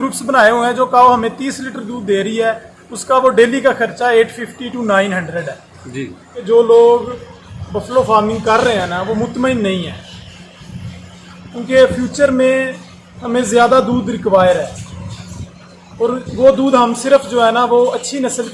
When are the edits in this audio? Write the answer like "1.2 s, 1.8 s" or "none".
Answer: 6.4 s